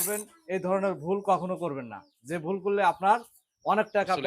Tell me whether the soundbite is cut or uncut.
uncut